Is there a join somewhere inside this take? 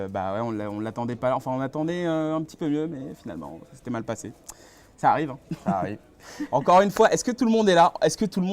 yes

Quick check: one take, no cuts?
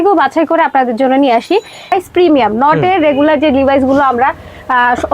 no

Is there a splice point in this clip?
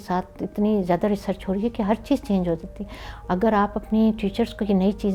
no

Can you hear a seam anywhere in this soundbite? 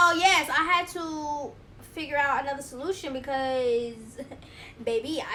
no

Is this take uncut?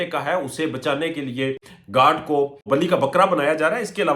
no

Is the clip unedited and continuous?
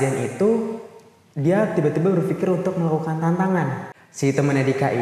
no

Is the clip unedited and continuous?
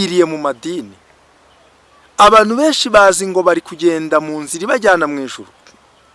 yes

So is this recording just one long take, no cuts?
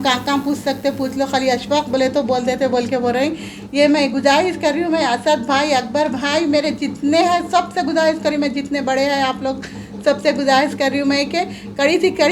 yes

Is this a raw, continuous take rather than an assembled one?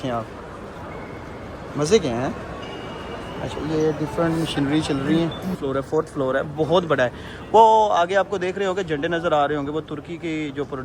no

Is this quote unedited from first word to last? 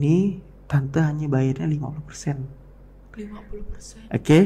yes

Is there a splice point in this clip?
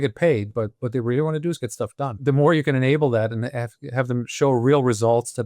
yes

